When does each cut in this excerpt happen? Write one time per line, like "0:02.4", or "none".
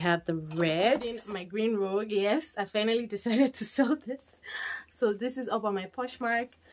0:01.1